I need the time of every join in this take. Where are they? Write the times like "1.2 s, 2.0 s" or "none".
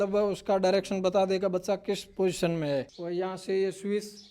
3.0 s